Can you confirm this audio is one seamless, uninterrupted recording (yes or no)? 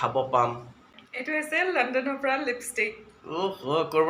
no